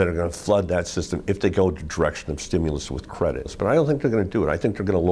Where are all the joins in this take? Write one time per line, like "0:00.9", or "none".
0:03.5